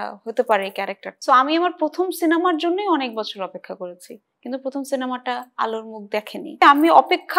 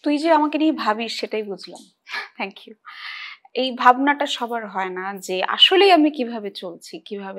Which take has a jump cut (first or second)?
first